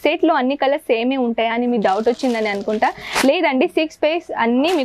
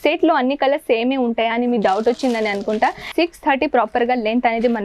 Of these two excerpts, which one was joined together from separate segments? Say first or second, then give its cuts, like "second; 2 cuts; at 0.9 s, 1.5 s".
second; 1 cut; at 3.1 s